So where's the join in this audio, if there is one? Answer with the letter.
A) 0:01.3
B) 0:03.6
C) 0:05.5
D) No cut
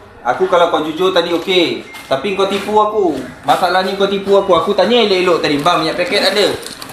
D